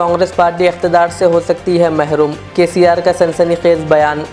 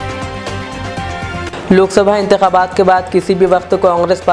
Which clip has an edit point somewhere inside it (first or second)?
second